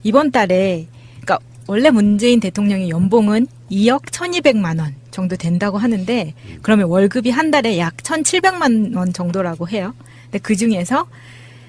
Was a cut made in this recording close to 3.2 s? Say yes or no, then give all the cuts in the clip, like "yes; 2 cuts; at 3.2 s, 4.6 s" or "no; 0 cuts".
yes; 1 cut; at 3.2 s